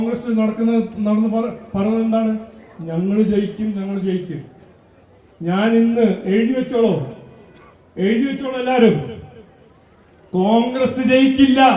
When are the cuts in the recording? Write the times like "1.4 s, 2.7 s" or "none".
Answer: none

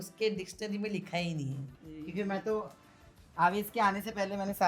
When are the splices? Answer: 1.7 s

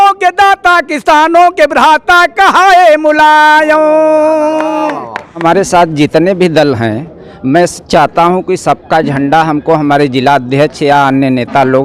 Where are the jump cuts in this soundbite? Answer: 5.4 s

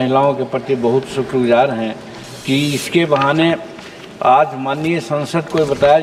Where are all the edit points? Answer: none

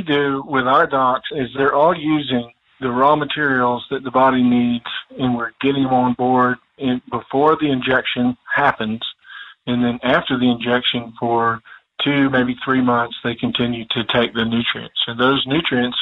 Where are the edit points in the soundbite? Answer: 1.5 s

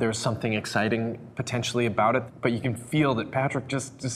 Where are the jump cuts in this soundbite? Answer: 2.2 s

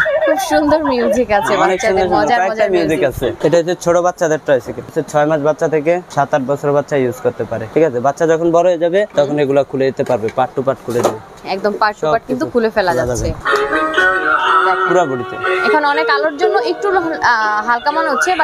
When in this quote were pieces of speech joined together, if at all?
3.3 s, 5.0 s, 6.1 s, 7.7 s, 9.1 s, 11.4 s, 13.4 s

